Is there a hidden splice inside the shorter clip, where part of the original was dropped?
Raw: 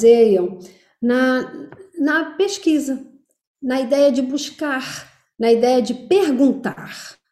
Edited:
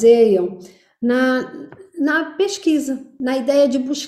yes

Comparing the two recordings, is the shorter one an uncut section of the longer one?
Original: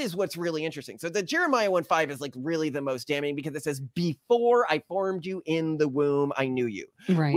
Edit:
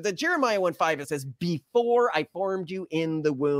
no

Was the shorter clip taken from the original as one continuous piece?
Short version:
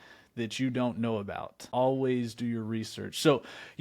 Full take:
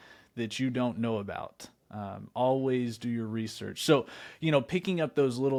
no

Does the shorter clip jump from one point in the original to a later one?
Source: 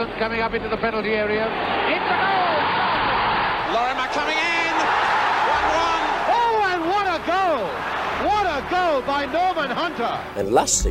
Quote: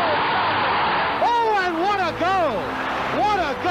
yes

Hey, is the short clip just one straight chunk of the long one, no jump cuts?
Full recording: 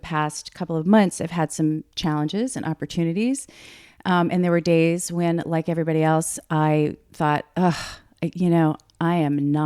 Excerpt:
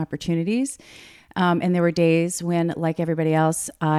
yes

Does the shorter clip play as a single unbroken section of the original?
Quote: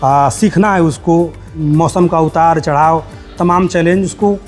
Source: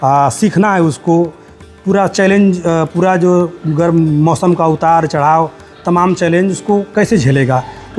no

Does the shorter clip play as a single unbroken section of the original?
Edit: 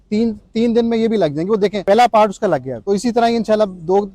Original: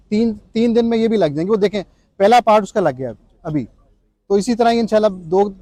no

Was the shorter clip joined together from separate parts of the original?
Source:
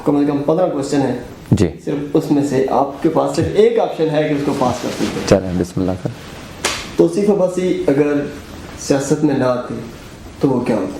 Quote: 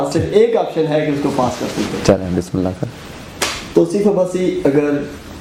no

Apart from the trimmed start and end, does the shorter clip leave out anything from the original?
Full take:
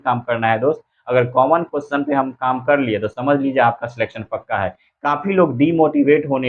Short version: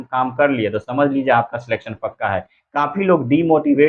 no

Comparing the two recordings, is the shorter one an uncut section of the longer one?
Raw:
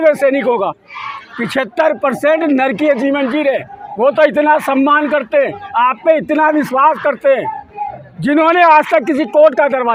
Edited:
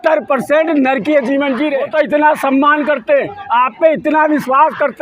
no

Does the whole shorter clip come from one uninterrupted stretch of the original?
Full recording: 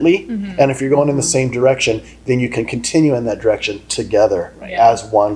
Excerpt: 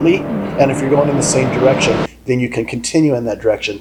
yes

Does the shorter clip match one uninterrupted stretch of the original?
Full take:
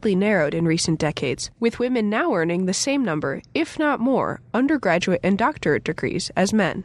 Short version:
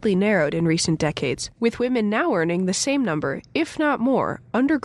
yes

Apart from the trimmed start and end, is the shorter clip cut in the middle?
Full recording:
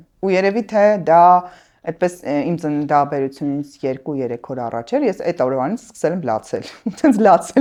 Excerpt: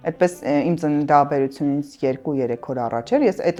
no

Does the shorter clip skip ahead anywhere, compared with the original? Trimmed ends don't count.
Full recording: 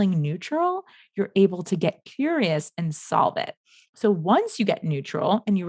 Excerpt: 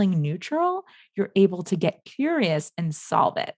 no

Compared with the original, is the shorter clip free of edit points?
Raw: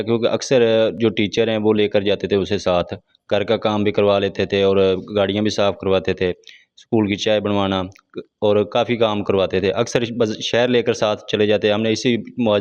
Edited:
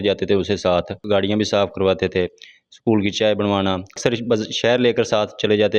no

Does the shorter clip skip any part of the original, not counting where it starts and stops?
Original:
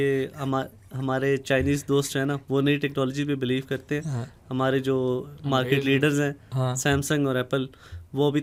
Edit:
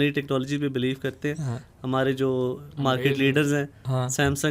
no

